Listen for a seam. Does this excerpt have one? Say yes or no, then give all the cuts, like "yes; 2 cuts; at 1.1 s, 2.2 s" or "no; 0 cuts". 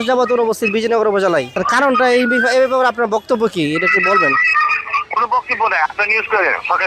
yes; 1 cut; at 1.5 s